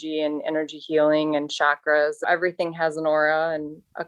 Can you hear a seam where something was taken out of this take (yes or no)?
yes